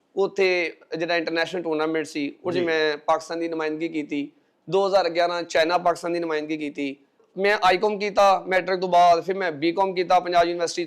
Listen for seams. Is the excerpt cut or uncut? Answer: cut